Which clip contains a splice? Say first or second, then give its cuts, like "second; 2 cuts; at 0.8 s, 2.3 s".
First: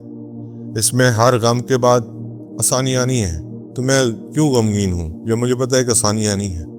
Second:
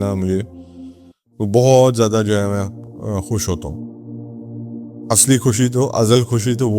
second; 2 cuts; at 3.6 s, 5.1 s